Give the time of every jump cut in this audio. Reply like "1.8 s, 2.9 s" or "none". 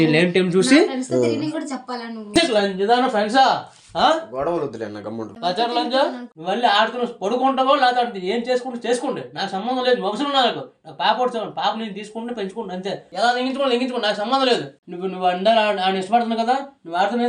5.3 s, 6.3 s